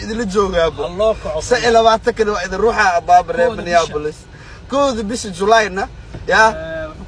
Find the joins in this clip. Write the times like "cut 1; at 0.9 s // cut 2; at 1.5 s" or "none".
none

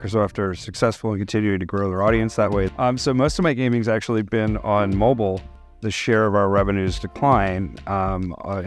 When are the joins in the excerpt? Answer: cut 1; at 2.7 s // cut 2; at 5.6 s

